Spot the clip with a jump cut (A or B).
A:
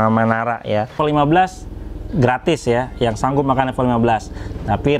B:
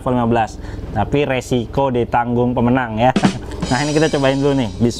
A